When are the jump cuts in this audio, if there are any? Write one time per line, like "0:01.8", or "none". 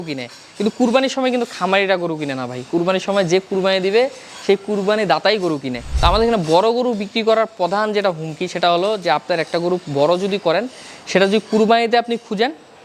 0:05.8